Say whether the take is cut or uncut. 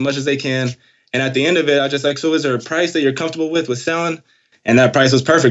cut